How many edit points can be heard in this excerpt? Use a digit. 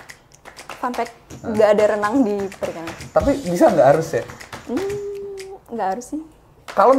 0